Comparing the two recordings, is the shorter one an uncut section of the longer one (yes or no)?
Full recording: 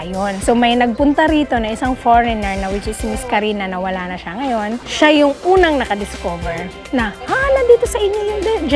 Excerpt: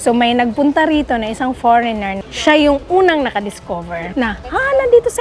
no